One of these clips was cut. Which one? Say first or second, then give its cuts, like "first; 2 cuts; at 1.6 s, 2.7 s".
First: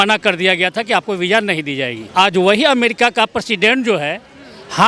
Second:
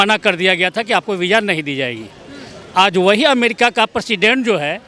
first; 1 cut; at 2.0 s